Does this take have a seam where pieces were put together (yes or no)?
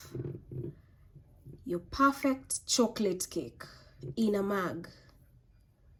no